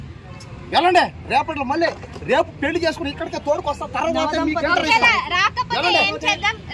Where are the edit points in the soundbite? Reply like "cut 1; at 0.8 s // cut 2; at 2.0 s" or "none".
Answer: none